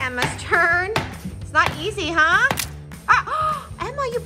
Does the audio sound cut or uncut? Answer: uncut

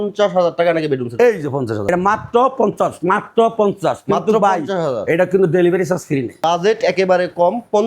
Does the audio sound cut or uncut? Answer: cut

